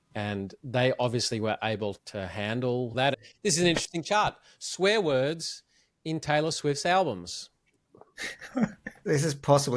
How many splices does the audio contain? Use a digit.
1